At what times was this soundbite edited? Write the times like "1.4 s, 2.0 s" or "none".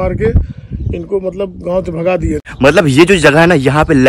2.4 s